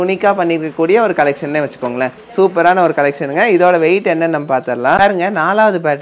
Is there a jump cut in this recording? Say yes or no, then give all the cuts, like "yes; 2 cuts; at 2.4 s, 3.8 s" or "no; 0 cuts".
yes; 1 cut; at 5.0 s